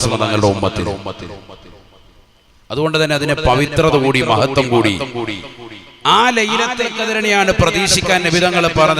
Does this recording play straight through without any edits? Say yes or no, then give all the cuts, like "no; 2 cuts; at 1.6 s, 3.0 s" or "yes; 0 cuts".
yes; 0 cuts